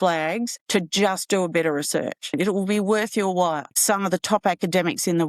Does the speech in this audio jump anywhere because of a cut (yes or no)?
yes